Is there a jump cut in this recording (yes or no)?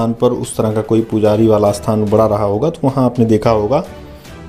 no